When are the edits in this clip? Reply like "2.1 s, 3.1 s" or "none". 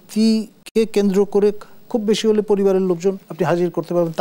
3.3 s